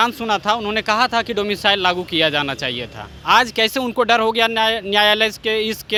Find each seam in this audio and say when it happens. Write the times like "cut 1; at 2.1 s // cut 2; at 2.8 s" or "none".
none